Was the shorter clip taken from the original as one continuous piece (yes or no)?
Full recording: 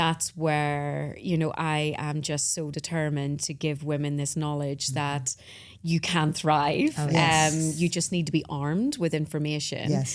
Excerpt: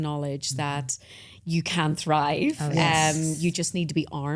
yes